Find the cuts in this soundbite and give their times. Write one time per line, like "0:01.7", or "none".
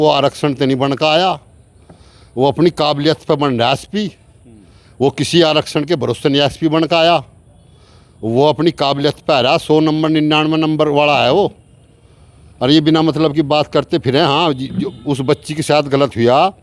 none